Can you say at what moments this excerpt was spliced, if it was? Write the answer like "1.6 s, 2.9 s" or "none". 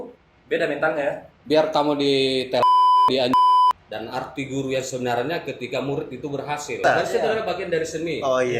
3.7 s, 6.8 s